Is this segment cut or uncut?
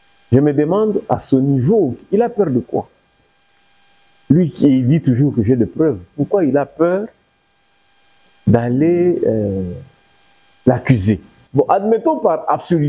cut